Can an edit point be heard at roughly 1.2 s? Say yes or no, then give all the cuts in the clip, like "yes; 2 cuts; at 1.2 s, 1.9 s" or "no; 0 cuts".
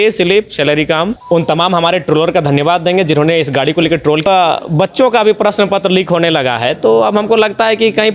yes; 2 cuts; at 1.2 s, 4.3 s